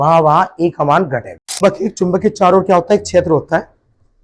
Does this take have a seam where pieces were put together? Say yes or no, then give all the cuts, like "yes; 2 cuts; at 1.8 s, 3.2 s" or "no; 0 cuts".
yes; 1 cut; at 1.6 s